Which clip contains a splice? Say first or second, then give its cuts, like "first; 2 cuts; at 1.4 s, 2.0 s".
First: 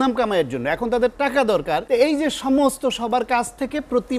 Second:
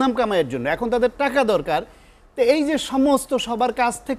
first; 1 cut; at 1.8 s